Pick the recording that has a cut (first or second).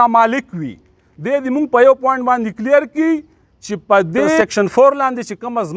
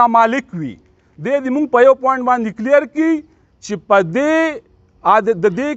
first